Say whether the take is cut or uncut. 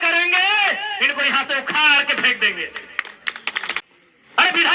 cut